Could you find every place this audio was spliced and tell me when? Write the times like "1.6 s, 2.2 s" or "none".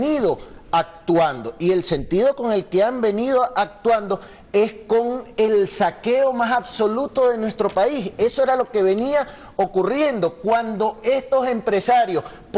1.9 s